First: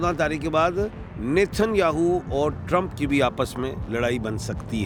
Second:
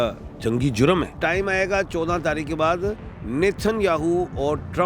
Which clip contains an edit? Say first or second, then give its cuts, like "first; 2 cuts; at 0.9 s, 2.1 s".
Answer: second; 1 cut; at 1.2 s